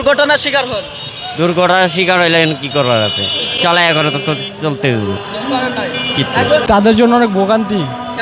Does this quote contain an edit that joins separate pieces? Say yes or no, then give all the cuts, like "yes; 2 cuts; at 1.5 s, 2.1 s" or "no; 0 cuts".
yes; 1 cut; at 6.6 s